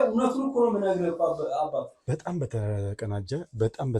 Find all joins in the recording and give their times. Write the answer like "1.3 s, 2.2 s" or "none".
2.0 s